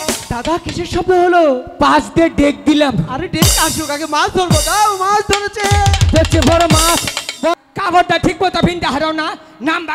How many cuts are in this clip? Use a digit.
1